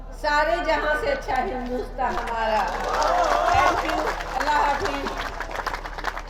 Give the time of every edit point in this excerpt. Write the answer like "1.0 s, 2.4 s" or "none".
none

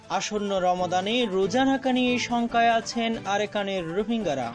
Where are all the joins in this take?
none

